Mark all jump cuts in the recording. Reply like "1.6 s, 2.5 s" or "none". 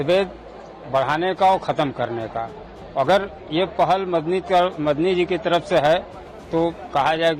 none